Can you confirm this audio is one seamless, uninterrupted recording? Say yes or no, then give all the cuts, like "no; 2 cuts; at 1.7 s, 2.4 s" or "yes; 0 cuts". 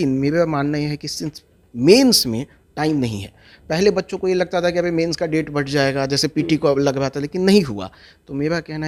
yes; 0 cuts